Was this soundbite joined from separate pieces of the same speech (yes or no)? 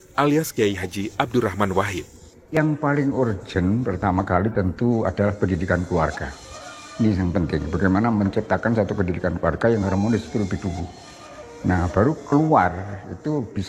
yes